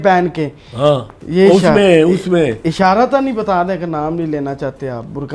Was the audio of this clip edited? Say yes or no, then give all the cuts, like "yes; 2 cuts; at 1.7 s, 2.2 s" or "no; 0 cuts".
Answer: no; 0 cuts